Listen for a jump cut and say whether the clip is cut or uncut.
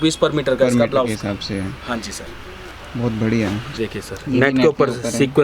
cut